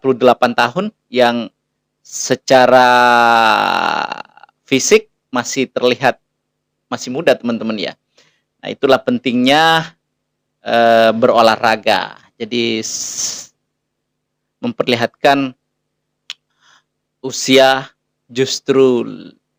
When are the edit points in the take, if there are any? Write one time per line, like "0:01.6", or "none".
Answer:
none